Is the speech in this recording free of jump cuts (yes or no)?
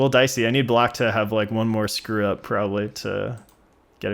yes